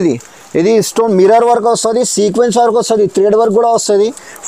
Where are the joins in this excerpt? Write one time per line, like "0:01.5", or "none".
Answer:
none